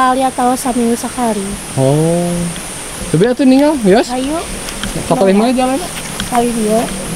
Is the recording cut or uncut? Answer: uncut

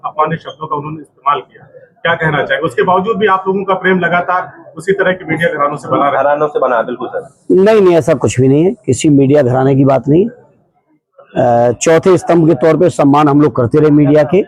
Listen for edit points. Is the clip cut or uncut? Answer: uncut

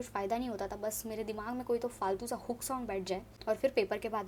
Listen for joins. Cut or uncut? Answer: uncut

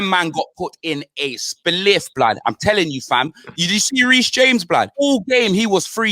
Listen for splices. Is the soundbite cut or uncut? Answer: cut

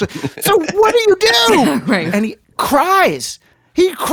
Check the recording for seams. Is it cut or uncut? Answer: cut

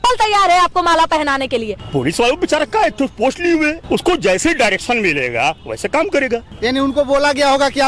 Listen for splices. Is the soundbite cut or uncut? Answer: cut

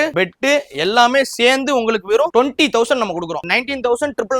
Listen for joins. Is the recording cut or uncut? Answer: uncut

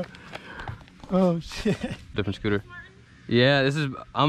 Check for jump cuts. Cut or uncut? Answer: cut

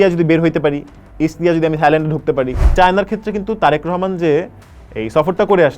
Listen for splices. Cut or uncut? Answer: cut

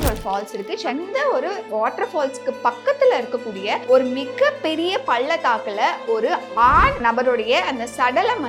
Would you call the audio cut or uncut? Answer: cut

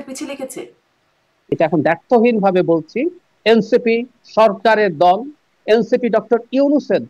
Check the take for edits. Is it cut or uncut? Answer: cut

